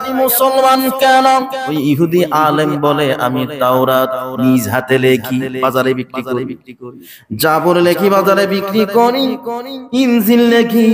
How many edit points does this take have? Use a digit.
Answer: 1